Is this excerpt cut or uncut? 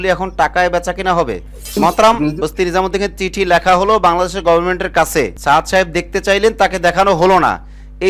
cut